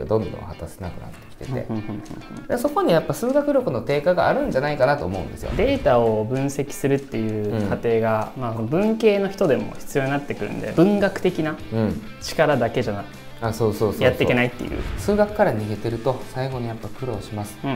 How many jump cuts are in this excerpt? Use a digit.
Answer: 3